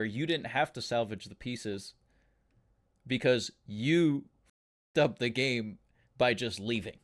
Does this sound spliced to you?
no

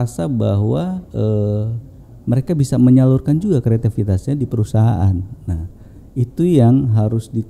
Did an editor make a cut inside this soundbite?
no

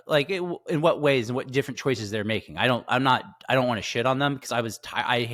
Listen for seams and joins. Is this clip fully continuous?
yes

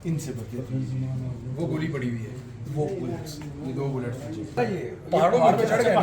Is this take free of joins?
no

